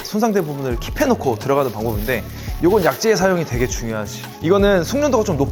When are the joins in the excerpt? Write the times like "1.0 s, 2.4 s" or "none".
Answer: none